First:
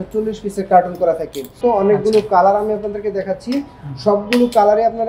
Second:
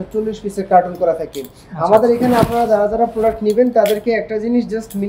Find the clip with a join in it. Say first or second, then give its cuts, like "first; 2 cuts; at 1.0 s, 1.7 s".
first; 1 cut; at 1.5 s